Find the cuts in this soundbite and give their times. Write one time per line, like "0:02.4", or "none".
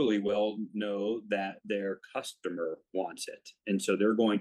none